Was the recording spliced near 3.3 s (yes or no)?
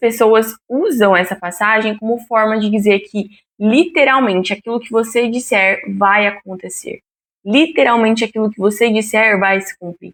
no